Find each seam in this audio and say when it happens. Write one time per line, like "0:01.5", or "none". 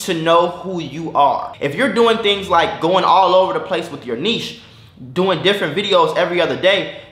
0:01.5